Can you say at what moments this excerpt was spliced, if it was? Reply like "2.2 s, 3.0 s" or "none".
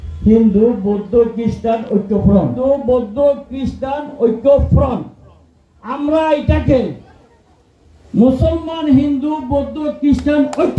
2.6 s